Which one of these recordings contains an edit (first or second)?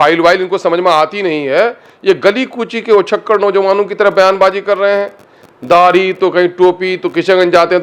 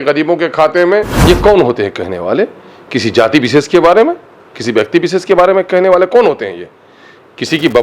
second